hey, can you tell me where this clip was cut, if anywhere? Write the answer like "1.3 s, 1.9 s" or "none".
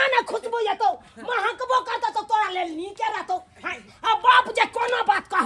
none